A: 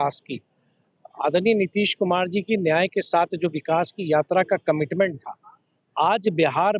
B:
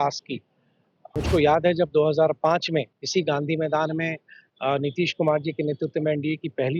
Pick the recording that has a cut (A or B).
B